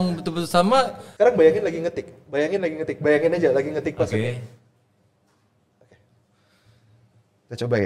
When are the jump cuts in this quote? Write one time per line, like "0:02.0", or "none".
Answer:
0:01.0